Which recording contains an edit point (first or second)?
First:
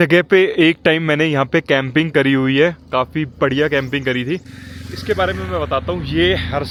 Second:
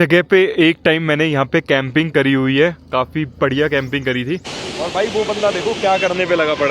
second